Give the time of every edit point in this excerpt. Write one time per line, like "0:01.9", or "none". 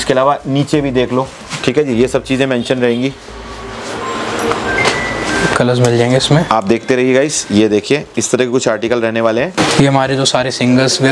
0:09.5

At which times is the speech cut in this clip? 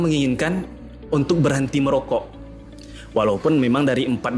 none

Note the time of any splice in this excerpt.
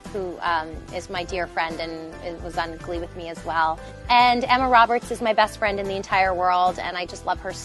0:03.4

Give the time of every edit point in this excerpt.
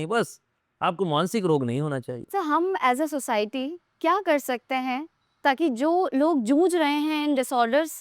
0:02.2

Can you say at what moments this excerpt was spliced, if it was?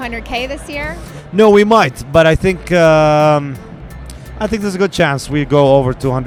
none

